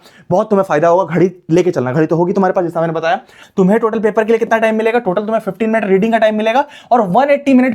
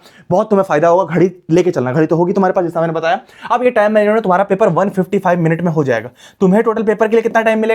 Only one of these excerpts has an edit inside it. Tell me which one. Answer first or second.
first